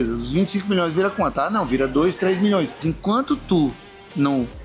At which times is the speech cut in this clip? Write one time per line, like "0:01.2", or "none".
0:02.8